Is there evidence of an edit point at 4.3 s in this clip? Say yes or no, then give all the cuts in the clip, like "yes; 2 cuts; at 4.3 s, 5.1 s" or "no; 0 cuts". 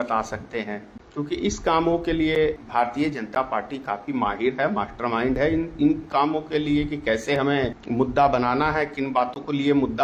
no; 3 cuts; at 1.0 s, 2.6 s, 7.8 s